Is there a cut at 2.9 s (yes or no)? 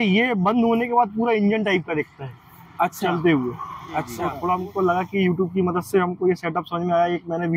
no